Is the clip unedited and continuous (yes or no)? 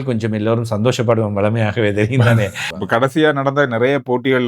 no